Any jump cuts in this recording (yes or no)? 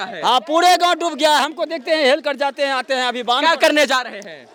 no